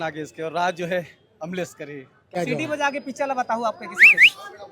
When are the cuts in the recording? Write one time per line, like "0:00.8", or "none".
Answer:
0:02.3